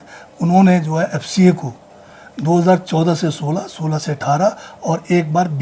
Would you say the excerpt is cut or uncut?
uncut